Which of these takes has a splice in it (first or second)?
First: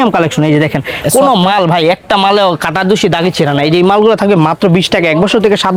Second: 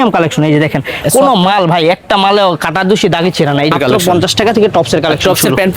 second